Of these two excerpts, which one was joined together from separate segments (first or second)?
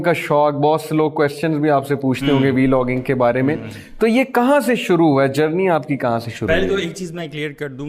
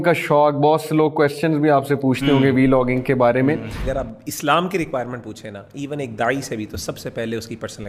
second